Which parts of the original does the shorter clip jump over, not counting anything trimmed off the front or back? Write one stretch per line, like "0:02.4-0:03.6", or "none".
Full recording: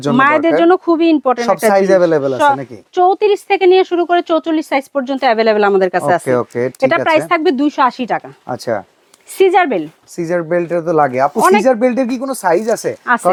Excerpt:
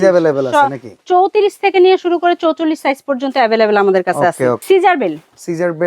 0:06.5-0:09.3